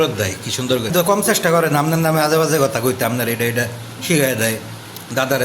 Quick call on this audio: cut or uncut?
cut